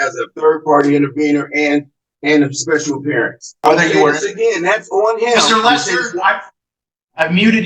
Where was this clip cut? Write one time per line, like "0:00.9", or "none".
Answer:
0:03.6